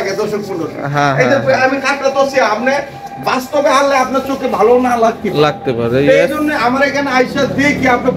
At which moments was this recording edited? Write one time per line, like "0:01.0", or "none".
none